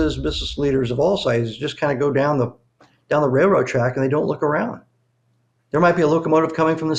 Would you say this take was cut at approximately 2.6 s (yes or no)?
no